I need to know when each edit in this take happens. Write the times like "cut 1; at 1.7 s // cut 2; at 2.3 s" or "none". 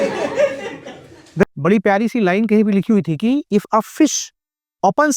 cut 1; at 1.3 s